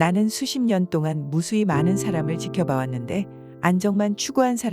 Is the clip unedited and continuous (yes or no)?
yes